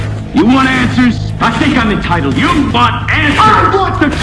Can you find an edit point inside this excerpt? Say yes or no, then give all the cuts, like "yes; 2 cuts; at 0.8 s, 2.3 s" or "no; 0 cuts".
no; 0 cuts